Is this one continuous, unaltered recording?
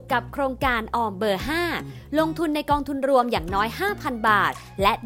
yes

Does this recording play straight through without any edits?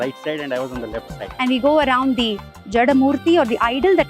no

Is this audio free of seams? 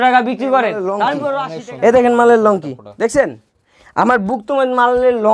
no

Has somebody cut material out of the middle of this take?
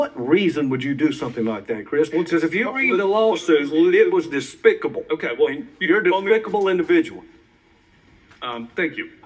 yes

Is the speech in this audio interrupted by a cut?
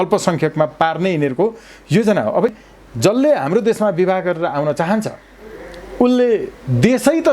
yes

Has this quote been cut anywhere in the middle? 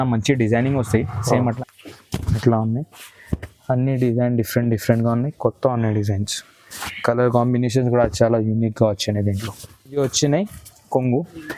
yes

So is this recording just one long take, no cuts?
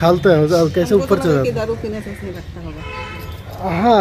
yes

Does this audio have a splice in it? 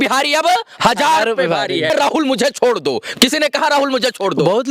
yes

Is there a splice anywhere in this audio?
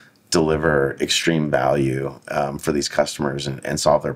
no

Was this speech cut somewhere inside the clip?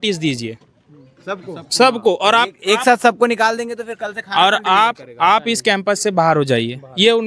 no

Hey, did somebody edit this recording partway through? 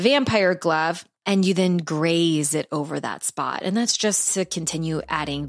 yes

